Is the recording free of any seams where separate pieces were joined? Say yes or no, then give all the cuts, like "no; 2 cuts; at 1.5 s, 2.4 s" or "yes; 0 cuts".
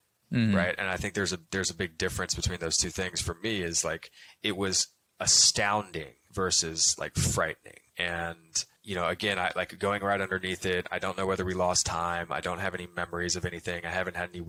yes; 0 cuts